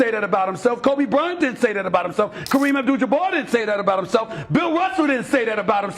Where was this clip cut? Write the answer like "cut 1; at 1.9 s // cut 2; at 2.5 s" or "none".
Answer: cut 1; at 2.4 s